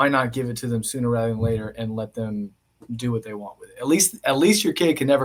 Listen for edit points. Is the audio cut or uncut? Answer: uncut